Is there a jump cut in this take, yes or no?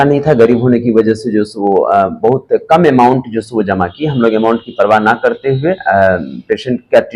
no